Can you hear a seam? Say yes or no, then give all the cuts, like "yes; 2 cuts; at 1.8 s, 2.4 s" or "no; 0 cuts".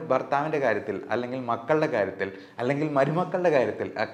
no; 0 cuts